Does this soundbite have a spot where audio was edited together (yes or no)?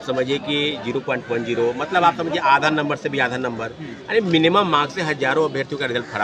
no